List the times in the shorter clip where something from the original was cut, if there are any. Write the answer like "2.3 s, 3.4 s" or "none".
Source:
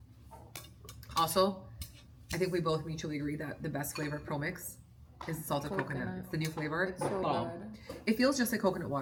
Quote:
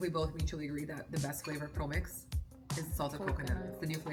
none